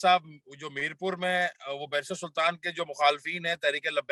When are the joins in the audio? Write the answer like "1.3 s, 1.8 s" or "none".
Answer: none